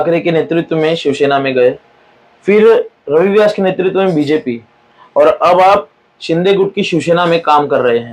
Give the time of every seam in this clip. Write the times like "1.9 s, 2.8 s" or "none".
none